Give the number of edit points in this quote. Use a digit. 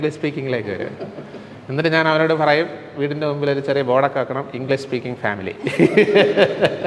0